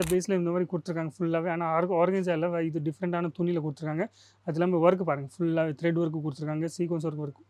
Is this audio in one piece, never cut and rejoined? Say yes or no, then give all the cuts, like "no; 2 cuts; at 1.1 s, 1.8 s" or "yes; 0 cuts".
yes; 0 cuts